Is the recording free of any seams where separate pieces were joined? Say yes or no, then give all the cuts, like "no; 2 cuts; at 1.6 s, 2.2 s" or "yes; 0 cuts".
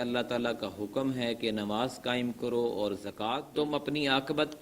no; 1 cut; at 3.5 s